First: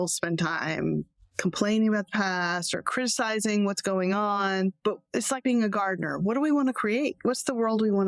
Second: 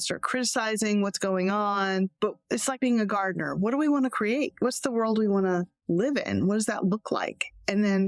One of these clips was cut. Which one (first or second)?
first